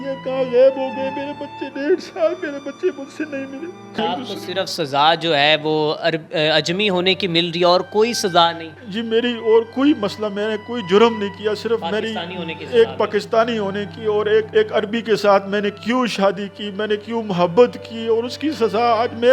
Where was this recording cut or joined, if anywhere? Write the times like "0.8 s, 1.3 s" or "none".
4.0 s, 14.5 s